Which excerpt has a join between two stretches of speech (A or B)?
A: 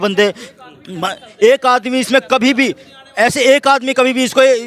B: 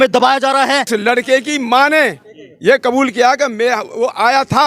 B